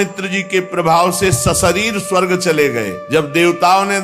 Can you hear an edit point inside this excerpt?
yes; 1 cut; at 3.0 s

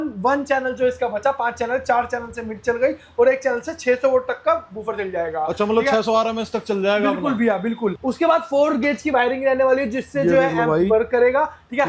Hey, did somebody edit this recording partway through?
yes; 1 cut; at 8.0 s

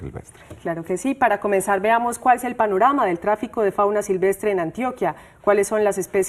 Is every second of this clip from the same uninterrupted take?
yes; 0 cuts

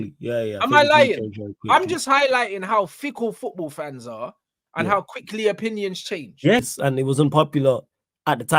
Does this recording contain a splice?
yes; 1 cut; at 6.6 s

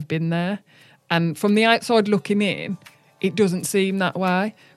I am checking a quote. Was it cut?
no; 0 cuts

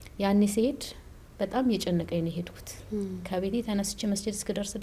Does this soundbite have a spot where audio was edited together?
no; 0 cuts

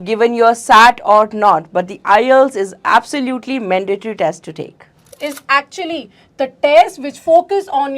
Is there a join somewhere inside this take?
yes; 1 cut; at 5.1 s

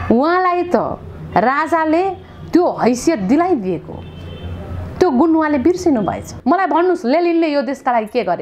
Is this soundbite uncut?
no; 1 cut; at 6.3 s

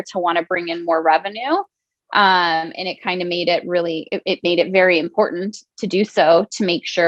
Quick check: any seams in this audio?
no; 0 cuts

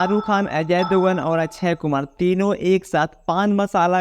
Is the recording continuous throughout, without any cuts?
yes; 0 cuts

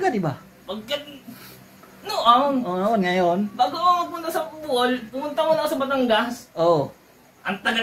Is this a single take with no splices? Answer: yes; 0 cuts

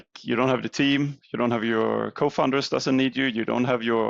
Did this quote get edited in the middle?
no; 0 cuts

